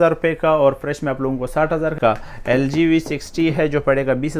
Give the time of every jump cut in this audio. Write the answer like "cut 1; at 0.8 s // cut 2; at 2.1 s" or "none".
cut 1; at 1.9 s